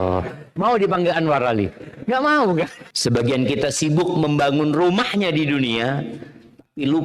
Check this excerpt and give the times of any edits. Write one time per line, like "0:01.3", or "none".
0:02.8

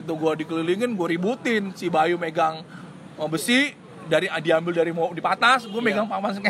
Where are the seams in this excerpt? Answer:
none

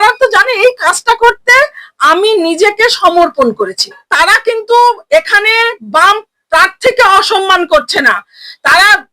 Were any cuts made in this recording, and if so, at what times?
0:04.0

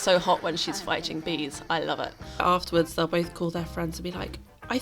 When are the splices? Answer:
0:02.4

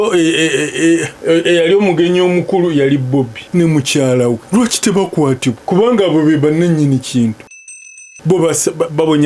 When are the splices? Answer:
0:01.1
0:03.4
0:04.4
0:05.6
0:07.8

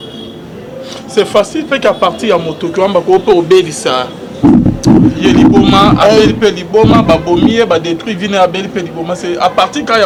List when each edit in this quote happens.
none

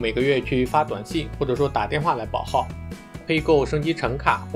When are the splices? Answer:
0:03.2

